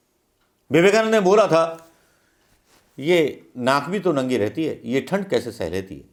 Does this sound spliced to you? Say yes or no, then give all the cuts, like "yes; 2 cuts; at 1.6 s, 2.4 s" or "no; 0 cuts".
no; 0 cuts